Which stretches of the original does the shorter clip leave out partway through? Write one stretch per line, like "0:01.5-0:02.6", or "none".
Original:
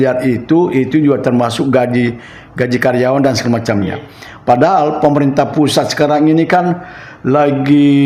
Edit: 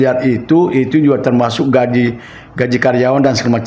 none